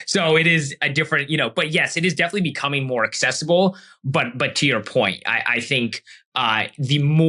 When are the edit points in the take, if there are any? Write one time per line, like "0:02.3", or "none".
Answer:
none